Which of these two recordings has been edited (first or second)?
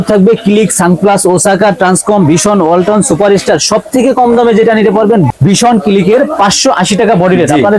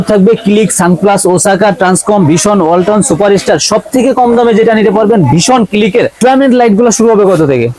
second